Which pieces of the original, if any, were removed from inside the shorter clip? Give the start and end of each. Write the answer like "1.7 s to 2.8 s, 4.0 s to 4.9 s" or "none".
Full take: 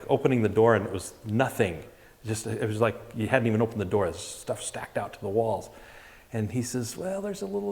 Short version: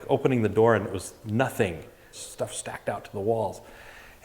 2.2 s to 4.3 s